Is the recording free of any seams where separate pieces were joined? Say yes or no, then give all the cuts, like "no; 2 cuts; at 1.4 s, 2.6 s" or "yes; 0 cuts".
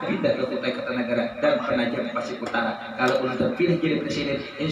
yes; 0 cuts